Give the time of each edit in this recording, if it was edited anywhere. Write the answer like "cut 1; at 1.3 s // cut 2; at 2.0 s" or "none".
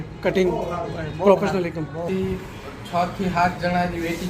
cut 1; at 2.1 s